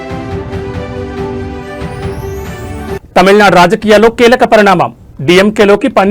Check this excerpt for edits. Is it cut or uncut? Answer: cut